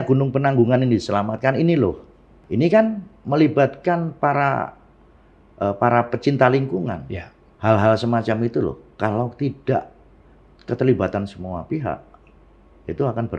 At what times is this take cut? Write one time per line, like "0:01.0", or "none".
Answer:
0:02.4
0:07.4